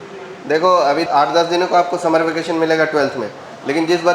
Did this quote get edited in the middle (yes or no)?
yes